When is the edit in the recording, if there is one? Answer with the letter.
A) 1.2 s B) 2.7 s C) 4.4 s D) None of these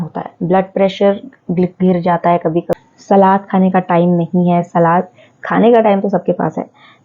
B